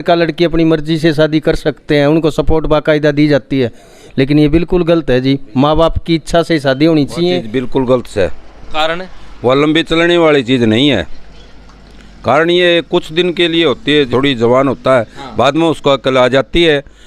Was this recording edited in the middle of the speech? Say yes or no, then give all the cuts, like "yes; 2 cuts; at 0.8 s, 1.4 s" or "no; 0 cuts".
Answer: yes; 2 cuts; at 7.5 s, 14.1 s